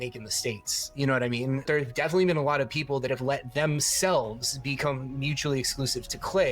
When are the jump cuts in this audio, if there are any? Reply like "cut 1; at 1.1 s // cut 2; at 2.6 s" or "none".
cut 1; at 1.6 s